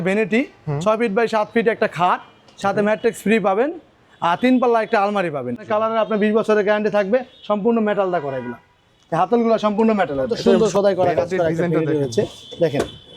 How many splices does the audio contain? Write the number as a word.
two